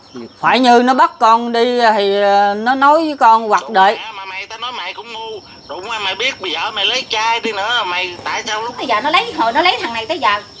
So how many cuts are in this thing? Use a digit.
1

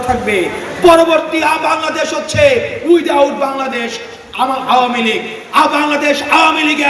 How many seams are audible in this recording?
0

